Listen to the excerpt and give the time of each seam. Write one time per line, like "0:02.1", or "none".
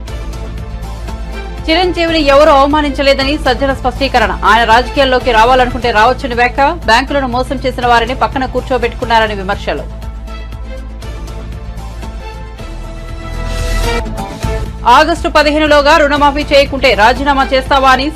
0:01.2